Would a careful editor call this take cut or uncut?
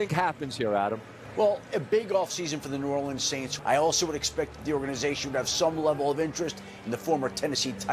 cut